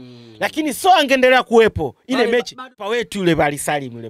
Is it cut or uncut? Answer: cut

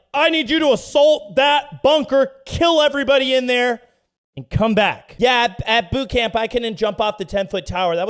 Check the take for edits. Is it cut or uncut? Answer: cut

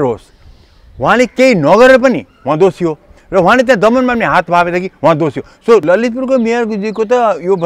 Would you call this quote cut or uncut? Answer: cut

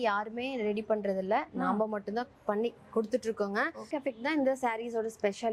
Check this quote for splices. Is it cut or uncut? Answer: cut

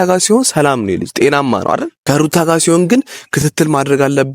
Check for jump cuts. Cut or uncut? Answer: cut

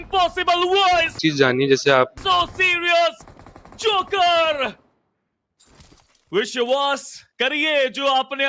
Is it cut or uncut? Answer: uncut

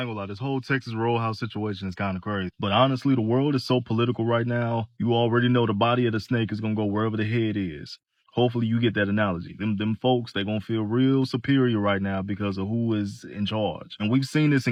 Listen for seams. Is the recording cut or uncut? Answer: uncut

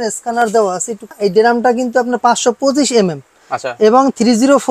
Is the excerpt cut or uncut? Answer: cut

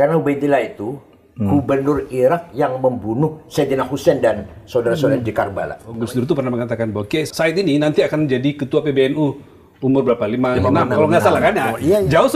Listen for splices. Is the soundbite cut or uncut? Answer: cut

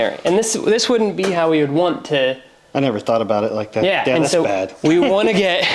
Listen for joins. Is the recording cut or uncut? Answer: uncut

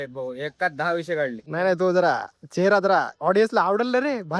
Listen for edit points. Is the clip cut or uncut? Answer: cut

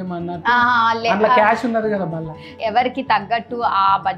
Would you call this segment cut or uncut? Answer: cut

